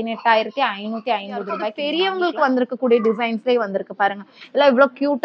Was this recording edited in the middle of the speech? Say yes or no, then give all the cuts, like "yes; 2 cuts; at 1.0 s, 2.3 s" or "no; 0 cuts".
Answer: yes; 1 cut; at 1.8 s